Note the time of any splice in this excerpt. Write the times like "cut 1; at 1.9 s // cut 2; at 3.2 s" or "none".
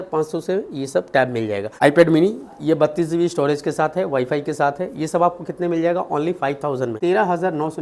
cut 1; at 1.7 s // cut 2; at 6.9 s